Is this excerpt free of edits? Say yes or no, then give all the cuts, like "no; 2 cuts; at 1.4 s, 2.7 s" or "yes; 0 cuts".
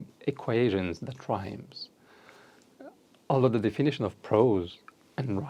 yes; 0 cuts